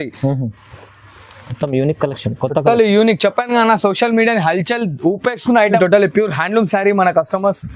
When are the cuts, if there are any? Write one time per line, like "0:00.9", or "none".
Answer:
0:05.7